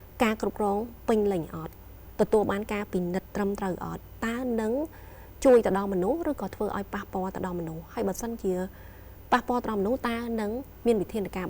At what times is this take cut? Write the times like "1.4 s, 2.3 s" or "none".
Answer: none